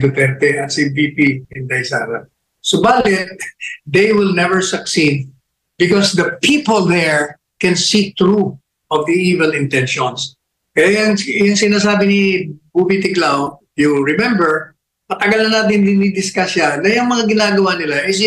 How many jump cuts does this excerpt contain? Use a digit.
0